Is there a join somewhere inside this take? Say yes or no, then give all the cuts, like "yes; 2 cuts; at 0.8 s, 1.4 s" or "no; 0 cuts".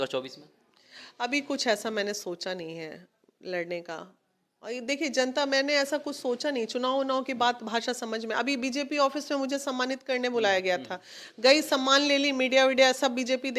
no; 0 cuts